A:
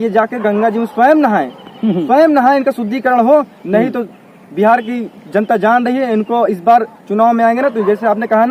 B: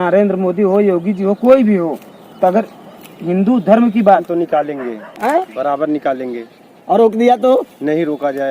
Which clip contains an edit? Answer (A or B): B